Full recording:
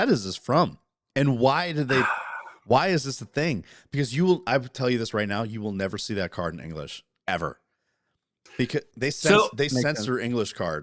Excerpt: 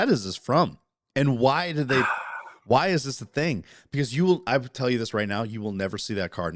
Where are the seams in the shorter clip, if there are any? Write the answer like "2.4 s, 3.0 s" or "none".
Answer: none